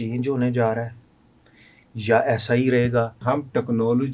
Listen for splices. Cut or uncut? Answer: cut